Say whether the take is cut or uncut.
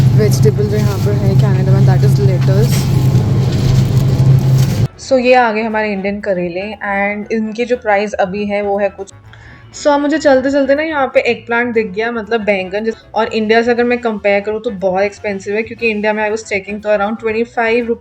cut